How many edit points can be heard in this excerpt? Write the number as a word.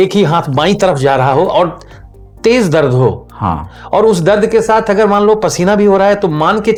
zero